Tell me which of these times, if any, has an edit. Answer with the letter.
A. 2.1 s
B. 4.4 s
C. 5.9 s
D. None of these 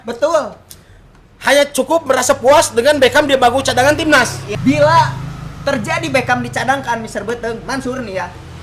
B